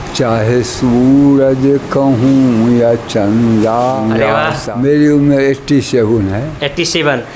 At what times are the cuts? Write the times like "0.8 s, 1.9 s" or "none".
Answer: 4.1 s